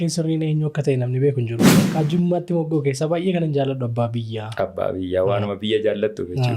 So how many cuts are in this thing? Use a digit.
1